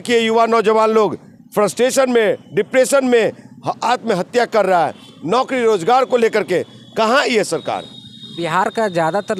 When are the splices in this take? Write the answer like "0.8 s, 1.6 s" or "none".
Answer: none